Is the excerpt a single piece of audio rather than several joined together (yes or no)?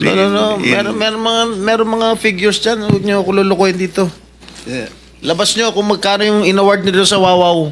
yes